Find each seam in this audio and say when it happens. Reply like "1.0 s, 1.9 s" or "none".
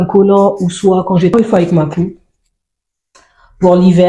1.3 s